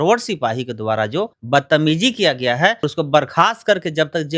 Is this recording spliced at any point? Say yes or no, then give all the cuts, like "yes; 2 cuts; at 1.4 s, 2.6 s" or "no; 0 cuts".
yes; 2 cuts; at 1.4 s, 2.9 s